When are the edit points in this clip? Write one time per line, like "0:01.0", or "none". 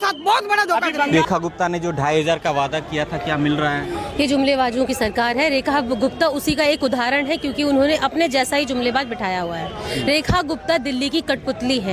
0:01.1